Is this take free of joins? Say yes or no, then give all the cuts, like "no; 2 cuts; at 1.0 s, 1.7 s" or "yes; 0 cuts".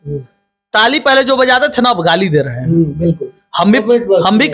yes; 0 cuts